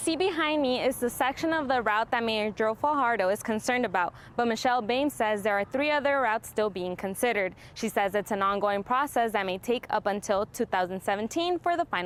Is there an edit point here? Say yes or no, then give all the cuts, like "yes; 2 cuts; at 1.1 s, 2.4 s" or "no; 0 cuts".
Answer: no; 0 cuts